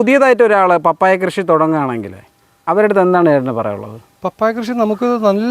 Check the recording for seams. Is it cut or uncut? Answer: uncut